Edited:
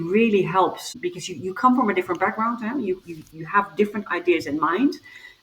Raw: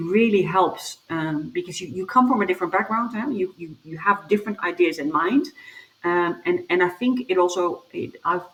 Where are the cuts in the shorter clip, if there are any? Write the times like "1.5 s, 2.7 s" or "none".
0.9 s

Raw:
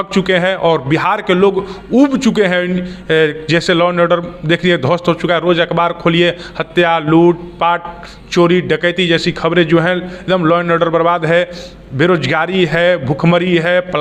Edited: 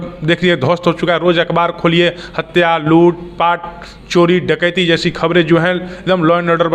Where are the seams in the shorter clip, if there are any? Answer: none

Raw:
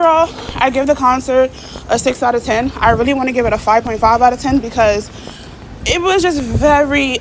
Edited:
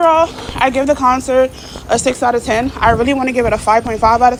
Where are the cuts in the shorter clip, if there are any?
none

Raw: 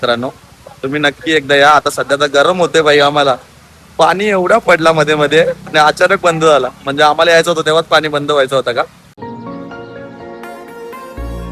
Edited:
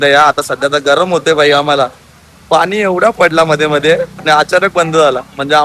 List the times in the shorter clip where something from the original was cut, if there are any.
none

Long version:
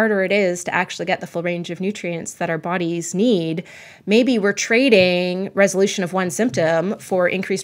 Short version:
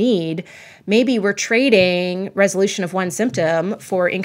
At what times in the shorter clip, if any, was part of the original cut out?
none

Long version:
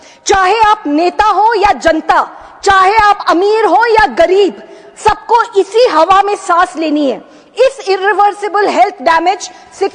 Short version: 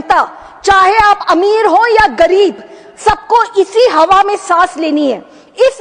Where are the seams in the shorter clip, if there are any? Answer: none

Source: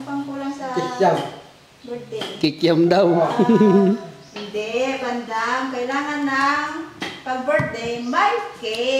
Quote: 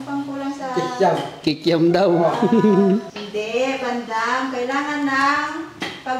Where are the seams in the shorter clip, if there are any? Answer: 1.3 s, 3.2 s

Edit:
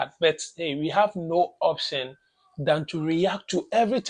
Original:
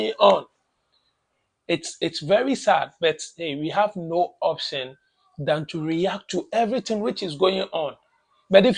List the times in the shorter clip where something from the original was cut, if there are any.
none

